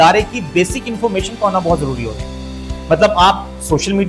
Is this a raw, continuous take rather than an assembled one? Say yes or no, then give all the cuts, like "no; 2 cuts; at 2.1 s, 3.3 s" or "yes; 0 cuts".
yes; 0 cuts